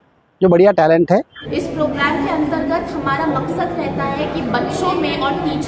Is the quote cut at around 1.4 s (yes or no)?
yes